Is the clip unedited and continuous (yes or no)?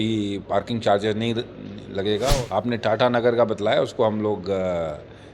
no